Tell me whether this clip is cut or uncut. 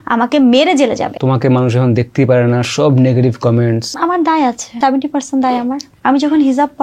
cut